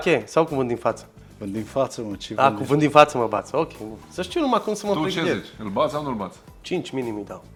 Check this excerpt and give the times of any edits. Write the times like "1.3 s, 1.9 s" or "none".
none